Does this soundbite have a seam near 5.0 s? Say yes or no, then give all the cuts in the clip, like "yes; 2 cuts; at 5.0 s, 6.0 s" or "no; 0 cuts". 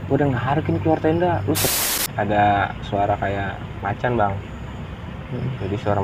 no; 1 cut; at 1.6 s